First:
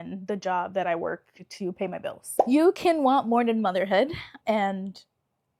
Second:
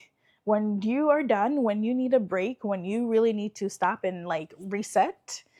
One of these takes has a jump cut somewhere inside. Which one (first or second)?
first